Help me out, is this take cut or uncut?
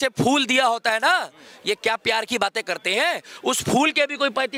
uncut